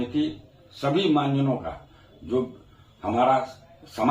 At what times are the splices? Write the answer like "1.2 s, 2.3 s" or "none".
none